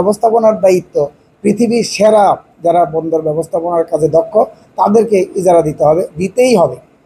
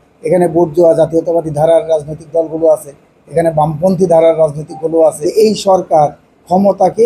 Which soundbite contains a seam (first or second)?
second